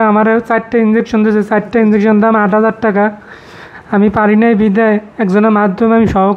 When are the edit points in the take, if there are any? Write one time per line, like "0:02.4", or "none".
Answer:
none